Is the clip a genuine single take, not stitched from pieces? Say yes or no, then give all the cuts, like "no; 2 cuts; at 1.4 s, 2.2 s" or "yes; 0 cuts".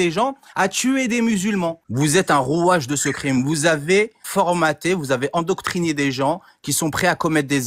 no; 2 cuts; at 1.8 s, 4.2 s